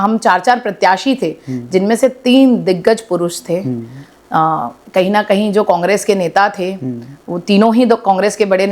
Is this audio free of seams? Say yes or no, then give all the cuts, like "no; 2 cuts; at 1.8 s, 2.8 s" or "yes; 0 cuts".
yes; 0 cuts